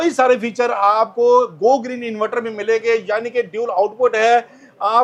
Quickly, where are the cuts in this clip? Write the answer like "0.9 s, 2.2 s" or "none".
none